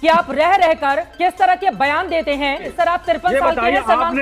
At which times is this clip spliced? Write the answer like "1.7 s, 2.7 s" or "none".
2.7 s